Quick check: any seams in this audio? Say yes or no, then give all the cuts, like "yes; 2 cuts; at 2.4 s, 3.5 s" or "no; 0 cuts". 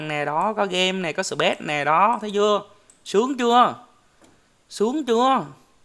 no; 0 cuts